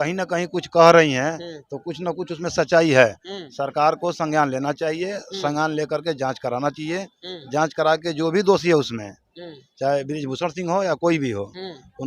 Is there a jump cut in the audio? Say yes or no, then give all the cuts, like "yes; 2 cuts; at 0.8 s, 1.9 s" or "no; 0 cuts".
no; 0 cuts